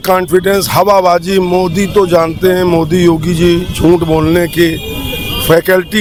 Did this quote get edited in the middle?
no; 0 cuts

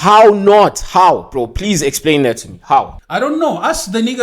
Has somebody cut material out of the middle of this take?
yes; 1 cut; at 3.0 s

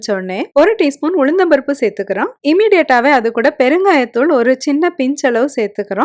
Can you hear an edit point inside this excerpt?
no; 0 cuts

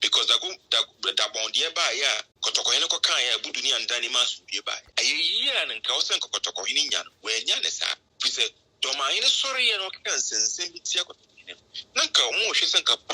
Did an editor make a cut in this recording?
yes; 3 cuts; at 2.3 s, 4.8 s, 8.1 s

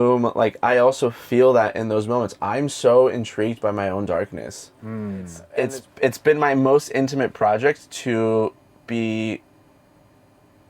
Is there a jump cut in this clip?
yes; 1 cut; at 5.4 s

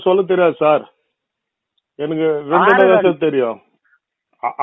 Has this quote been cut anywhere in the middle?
no; 0 cuts

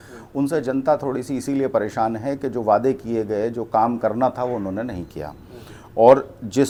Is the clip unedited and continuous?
yes; 0 cuts

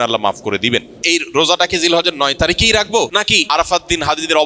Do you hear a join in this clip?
yes; 2 cuts; at 1.0 s, 3.4 s

